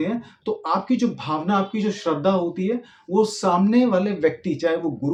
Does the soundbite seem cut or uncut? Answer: uncut